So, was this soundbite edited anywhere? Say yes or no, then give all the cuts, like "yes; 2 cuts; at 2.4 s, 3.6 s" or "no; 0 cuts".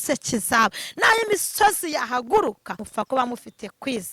yes; 1 cut; at 2.8 s